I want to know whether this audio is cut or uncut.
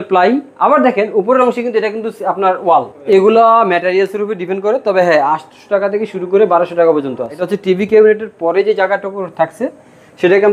cut